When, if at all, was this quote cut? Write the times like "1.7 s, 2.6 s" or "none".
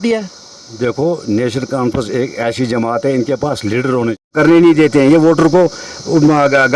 4.3 s